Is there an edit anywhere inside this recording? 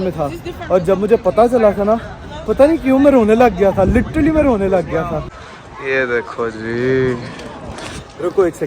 yes; 1 cut; at 5.2 s

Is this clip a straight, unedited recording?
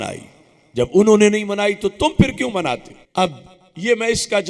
no; 1 cut; at 3.0 s

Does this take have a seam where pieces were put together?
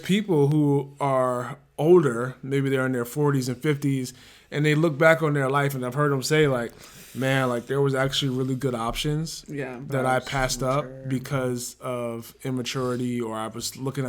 no; 0 cuts

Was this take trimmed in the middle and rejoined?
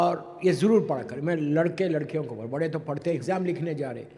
yes; 1 cut; at 3.2 s

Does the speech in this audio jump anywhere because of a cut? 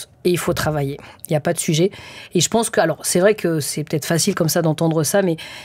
no; 0 cuts

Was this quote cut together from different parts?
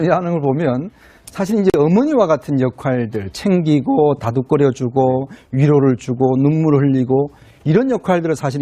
yes; 1 cut; at 4.9 s

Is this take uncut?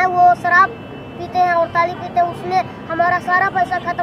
yes; 0 cuts

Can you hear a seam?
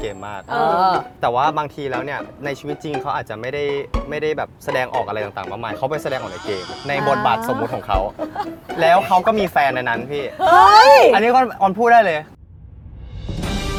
no; 0 cuts

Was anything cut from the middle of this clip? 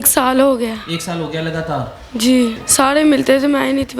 yes; 1 cut; at 2.5 s

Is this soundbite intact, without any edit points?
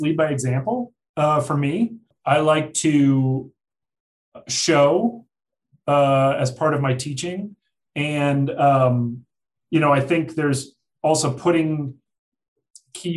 no; 1 cut; at 2.1 s

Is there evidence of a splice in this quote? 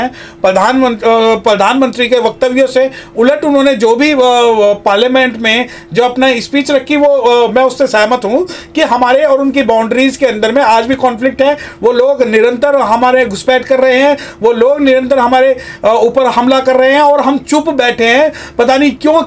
no; 0 cuts

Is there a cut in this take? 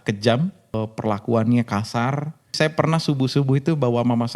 yes; 2 cuts; at 0.8 s, 2.5 s

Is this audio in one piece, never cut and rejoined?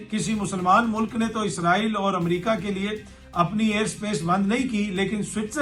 yes; 0 cuts

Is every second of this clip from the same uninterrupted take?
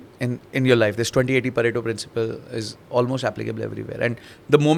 yes; 0 cuts

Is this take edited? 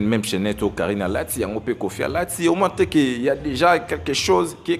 no; 0 cuts

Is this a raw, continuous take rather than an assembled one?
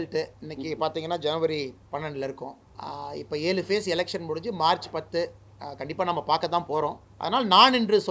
no; 2 cuts; at 2.7 s, 7.1 s

